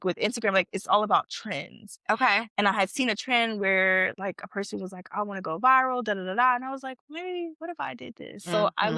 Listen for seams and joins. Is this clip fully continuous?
yes; 0 cuts

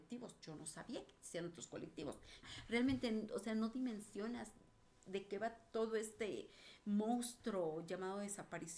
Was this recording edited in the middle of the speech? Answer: yes; 1 cut; at 2.4 s

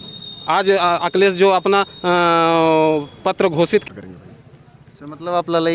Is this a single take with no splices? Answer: no; 1 cut; at 3.8 s

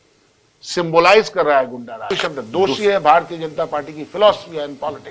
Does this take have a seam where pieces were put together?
yes; 1 cut; at 2.1 s

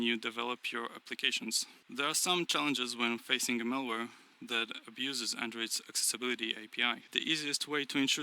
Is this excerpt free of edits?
no; 2 cuts; at 1.7 s, 7.0 s

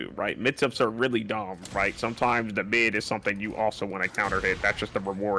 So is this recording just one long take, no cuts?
yes; 0 cuts

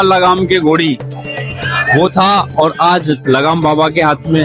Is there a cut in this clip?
no; 0 cuts

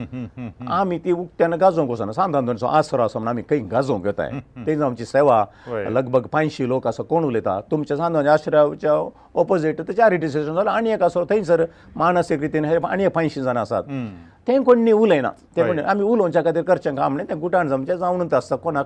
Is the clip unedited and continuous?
yes; 0 cuts

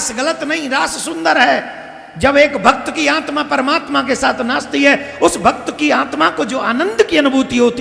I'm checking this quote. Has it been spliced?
no; 0 cuts

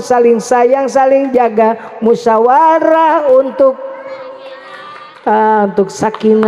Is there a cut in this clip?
no; 0 cuts

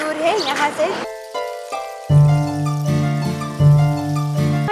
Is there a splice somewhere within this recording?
no; 0 cuts

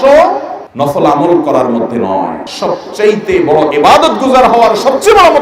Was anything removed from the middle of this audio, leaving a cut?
yes; 1 cut; at 2.4 s

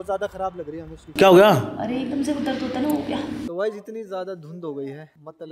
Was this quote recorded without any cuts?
no; 2 cuts; at 1.0 s, 3.4 s

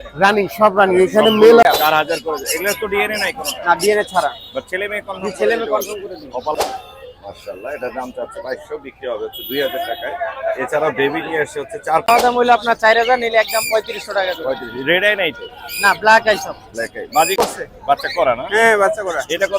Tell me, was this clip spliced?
yes; 4 cuts; at 1.6 s, 6.5 s, 12.1 s, 17.4 s

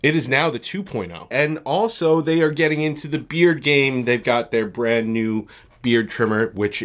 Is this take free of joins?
no; 1 cut; at 1.3 s

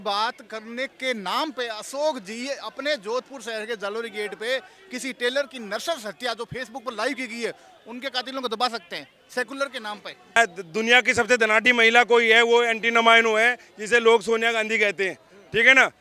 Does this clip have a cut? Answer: yes; 1 cut; at 10.4 s

